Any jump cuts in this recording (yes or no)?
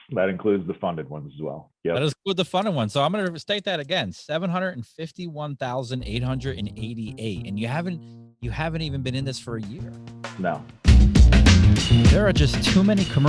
yes